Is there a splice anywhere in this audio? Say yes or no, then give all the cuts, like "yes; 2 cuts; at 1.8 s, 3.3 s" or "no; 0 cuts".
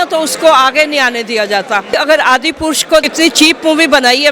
yes; 2 cuts; at 2.0 s, 3.1 s